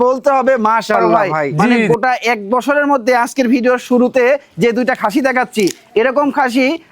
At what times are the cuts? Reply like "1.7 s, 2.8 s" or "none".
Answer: 1.9 s

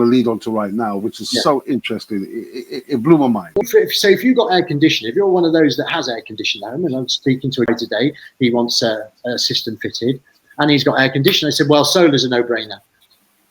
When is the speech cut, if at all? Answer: 3.7 s, 7.7 s

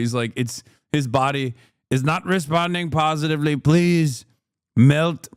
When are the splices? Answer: none

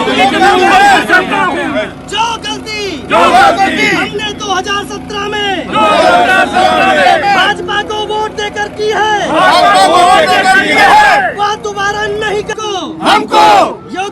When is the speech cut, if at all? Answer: 12.6 s

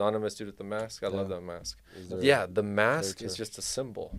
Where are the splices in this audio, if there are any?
2.0 s

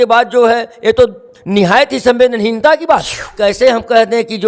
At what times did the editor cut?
3.3 s

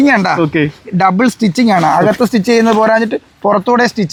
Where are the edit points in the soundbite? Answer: none

